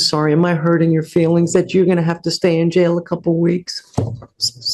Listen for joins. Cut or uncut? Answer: uncut